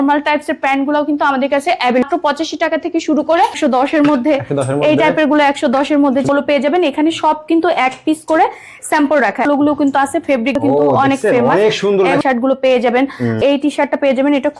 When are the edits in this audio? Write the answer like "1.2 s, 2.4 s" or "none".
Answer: 2.0 s, 3.6 s, 6.2 s, 9.5 s, 10.6 s, 12.2 s, 13.4 s